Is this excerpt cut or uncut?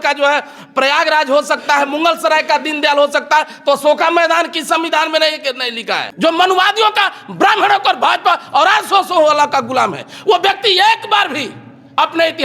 cut